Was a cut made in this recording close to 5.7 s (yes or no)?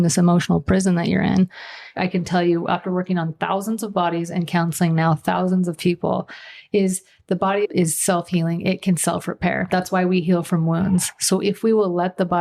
no